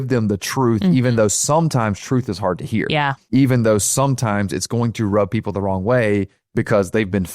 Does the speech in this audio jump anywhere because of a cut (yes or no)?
yes